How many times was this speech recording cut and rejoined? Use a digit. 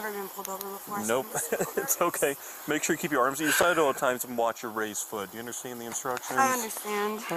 0